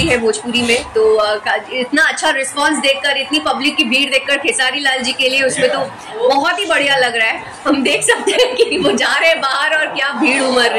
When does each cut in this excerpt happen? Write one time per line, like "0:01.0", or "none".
none